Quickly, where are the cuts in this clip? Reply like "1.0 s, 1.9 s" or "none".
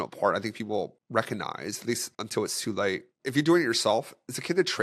2.1 s, 3.1 s